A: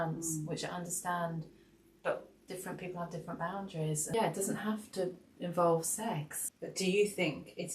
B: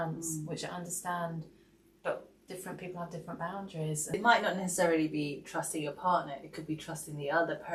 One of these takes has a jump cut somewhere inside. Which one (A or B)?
A